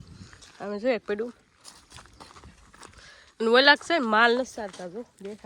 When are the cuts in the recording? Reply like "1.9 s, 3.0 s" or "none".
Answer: none